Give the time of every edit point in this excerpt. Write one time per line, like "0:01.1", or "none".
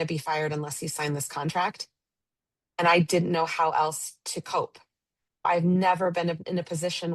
0:05.4